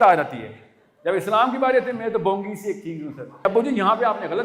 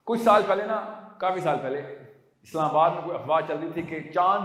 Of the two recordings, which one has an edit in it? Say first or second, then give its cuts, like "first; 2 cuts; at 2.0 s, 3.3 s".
first; 1 cut; at 3.5 s